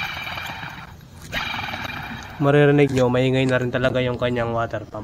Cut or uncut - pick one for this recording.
uncut